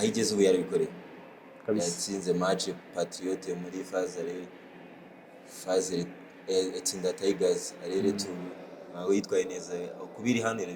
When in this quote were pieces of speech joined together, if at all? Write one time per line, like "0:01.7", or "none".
none